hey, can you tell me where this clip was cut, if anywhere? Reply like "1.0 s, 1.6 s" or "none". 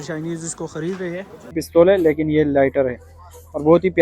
1.6 s